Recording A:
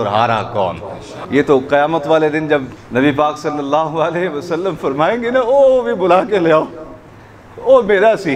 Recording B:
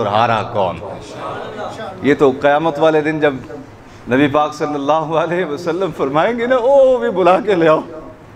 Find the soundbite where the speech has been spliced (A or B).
A